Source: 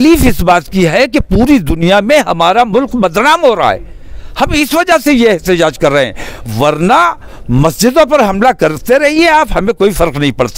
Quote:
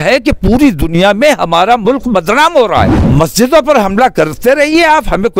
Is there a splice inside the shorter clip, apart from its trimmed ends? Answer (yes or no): yes